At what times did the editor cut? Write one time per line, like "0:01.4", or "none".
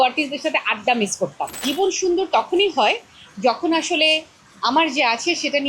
0:01.6